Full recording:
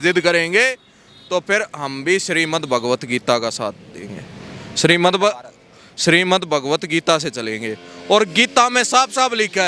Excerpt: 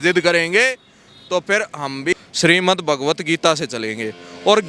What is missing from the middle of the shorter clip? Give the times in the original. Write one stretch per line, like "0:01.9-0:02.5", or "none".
0:02.1-0:05.8